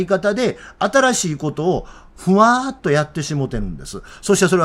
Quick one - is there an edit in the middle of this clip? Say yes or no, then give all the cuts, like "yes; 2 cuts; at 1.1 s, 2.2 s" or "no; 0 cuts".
no; 0 cuts